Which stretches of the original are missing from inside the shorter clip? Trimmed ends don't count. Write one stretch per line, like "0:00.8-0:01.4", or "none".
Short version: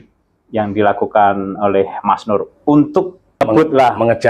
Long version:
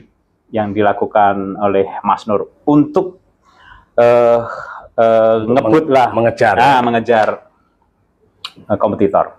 0:03.4-0:05.6